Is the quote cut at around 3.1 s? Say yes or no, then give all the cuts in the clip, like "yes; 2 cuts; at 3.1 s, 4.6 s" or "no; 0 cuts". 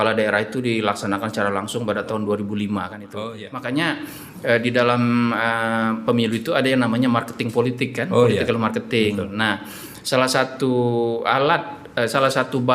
yes; 1 cut; at 3.1 s